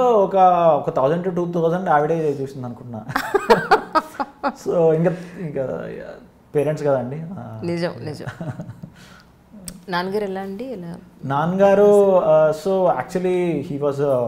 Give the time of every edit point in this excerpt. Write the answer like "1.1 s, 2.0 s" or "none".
none

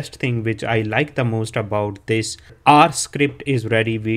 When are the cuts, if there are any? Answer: 2.6 s

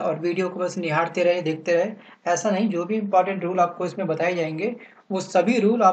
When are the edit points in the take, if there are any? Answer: none

